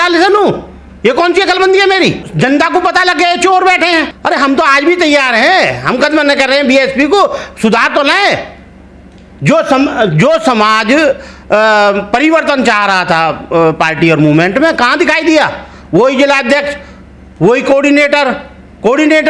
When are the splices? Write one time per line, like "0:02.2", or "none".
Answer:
0:02.3
0:04.1